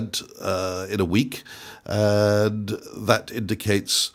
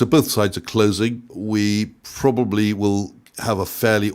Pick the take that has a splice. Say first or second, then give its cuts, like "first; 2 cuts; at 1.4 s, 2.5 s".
second; 1 cut; at 1.3 s